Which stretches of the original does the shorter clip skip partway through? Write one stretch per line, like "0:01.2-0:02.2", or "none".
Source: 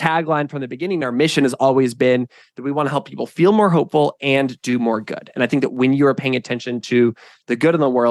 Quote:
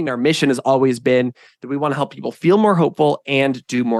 none